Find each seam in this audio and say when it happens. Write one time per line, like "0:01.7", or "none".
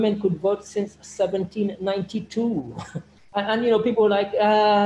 0:03.1

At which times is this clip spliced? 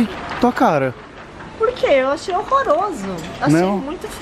none

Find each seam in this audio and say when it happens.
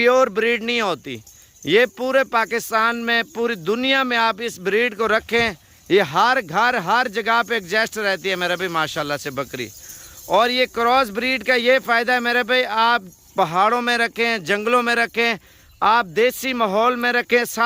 none

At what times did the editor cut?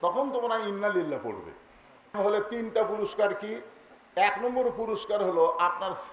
0:02.1

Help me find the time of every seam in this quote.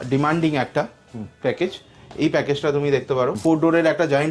0:03.4

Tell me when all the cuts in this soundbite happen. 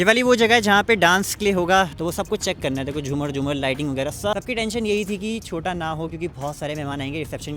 0:01.9
0:04.3

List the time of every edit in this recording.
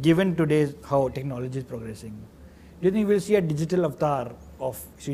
none

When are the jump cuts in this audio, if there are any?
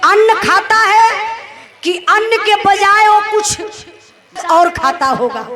0:04.4

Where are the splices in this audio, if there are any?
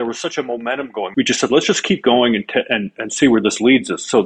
0:01.0

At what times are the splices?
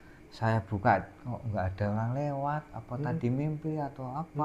none

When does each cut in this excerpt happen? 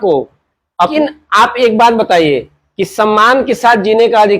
0:00.9

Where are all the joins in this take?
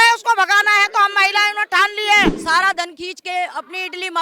0:02.4

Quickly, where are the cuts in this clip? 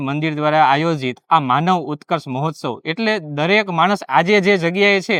none

